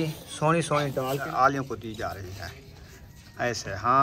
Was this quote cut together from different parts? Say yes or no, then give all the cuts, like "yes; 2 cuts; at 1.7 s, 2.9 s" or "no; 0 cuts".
yes; 1 cut; at 1.3 s